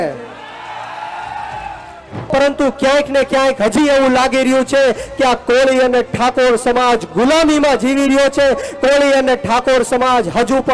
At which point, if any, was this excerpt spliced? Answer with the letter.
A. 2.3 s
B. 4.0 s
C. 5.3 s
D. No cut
A